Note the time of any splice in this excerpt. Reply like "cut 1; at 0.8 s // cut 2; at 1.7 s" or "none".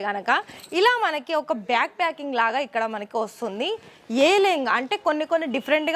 none